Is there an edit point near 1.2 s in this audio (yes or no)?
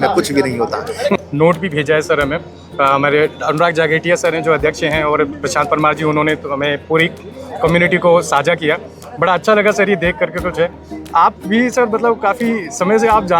yes